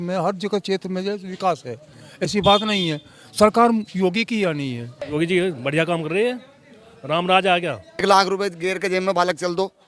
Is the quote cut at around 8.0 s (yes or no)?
yes